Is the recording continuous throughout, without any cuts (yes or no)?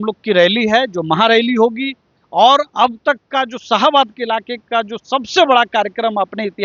yes